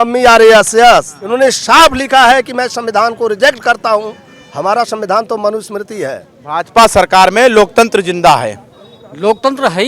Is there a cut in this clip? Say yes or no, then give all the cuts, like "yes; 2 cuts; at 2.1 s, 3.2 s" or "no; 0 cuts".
yes; 2 cuts; at 1.2 s, 6.3 s